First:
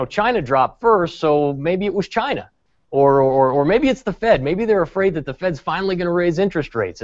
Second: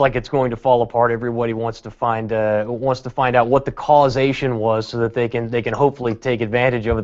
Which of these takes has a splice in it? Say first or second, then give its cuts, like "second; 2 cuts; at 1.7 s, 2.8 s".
second; 1 cut; at 4.9 s